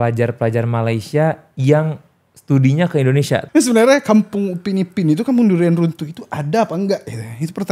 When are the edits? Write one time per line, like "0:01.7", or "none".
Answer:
0:03.4